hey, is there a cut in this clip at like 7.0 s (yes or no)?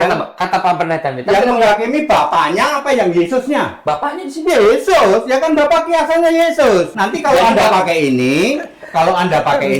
yes